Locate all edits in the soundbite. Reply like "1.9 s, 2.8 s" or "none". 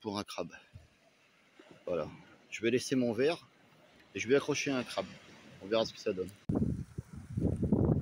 none